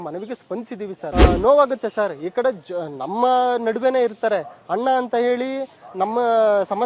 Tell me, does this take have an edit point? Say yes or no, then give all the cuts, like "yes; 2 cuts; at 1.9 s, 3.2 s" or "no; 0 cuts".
yes; 1 cut; at 1.0 s